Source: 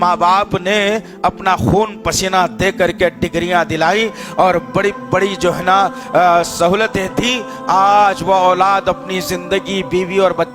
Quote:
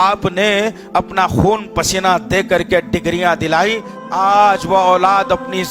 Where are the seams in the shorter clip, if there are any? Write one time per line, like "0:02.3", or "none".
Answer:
0:03.9